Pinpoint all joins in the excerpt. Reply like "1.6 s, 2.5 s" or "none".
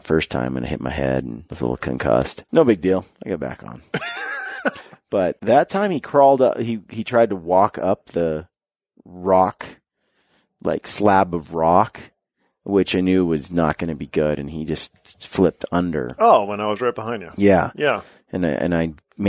1.4 s, 2.4 s, 3.1 s, 4.9 s